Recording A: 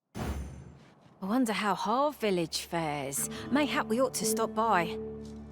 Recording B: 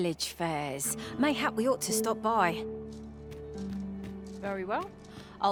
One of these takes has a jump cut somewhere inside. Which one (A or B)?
A